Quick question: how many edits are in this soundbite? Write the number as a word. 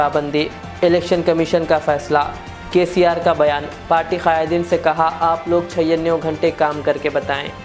zero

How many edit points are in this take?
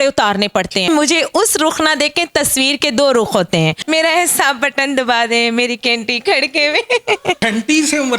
three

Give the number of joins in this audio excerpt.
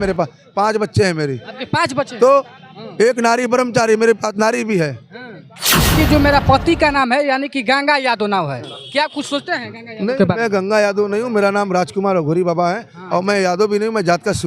one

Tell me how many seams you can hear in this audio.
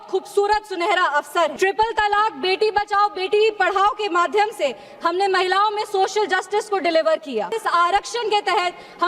two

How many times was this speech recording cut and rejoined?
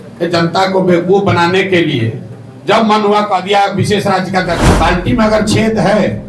one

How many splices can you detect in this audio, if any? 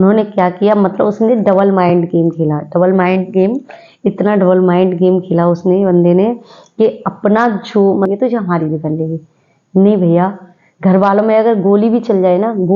one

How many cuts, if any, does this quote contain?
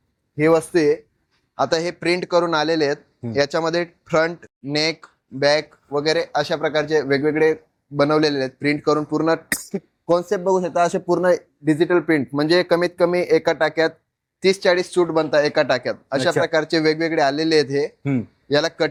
zero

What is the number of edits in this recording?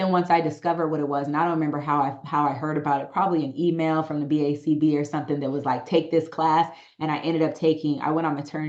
zero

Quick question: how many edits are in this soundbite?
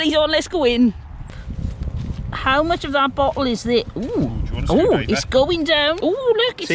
two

